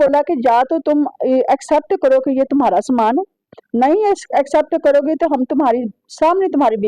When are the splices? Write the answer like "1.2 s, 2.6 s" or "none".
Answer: none